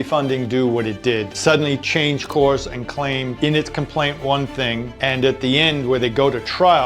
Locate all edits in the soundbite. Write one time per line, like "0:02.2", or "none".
0:01.3
0:03.3
0:04.9